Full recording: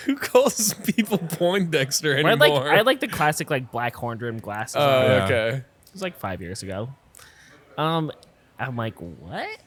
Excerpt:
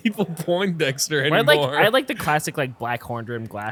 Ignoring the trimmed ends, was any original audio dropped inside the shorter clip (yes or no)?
no